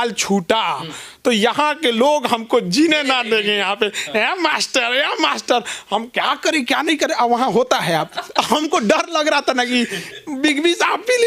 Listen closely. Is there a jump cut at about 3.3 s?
no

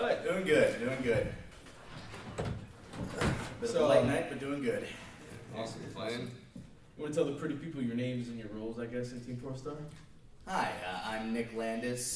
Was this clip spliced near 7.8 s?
yes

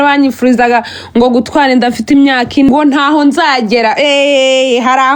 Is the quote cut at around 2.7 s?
yes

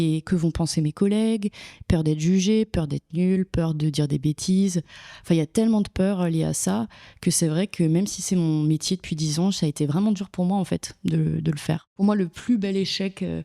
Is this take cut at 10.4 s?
no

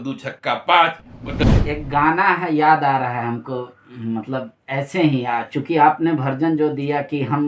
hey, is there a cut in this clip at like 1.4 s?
yes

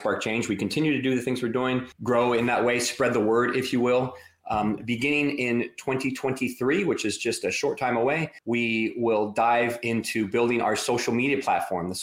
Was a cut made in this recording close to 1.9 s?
yes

